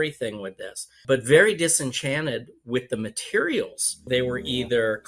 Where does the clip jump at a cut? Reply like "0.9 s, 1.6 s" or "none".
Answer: 1.0 s, 4.1 s